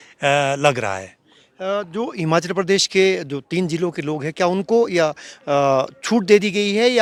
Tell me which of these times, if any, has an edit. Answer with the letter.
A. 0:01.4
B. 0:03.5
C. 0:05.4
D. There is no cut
D